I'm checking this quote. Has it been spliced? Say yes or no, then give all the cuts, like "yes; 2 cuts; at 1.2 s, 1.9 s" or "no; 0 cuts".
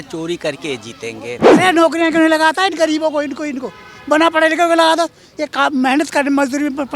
yes; 1 cut; at 1.4 s